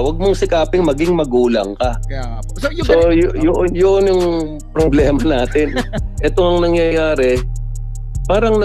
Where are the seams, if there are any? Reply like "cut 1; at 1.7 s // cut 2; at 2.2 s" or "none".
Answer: cut 1; at 6.0 s

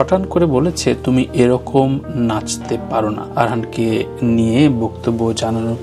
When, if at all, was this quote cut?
none

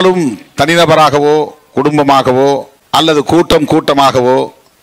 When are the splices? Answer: cut 1; at 2.7 s

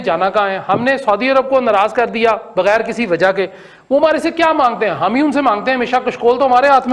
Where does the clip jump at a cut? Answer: none

